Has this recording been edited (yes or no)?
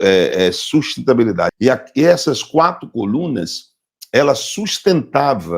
yes